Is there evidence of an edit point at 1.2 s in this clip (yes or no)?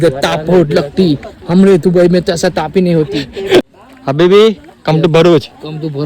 no